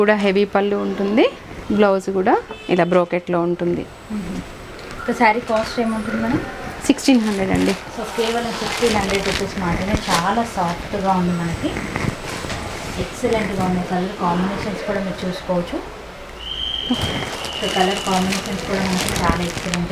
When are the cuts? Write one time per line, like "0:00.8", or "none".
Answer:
none